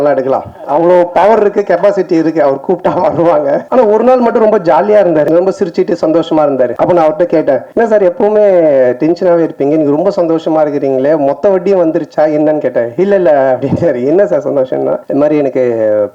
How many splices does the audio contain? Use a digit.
5